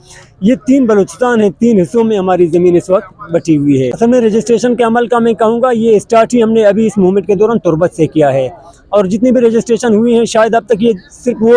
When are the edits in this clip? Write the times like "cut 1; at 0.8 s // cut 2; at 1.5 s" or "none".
cut 1; at 3.9 s

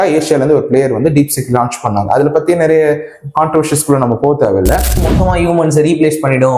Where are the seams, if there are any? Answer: cut 1; at 5.1 s

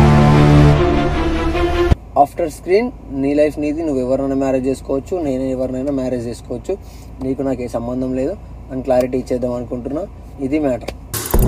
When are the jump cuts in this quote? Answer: cut 1; at 1.9 s

